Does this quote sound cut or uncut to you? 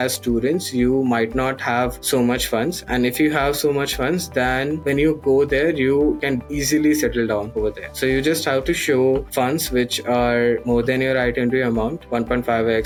uncut